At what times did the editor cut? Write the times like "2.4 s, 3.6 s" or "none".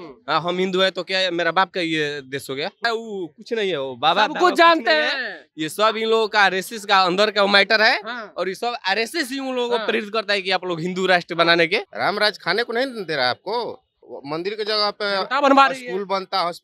2.8 s, 11.9 s, 14.1 s